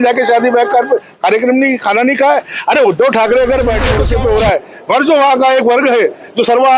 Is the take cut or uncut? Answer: cut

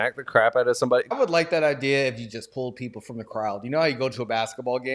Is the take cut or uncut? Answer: cut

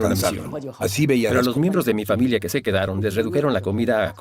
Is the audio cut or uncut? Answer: cut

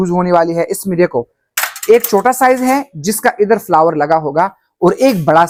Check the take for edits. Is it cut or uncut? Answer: uncut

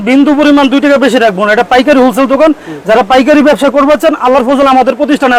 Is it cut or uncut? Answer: uncut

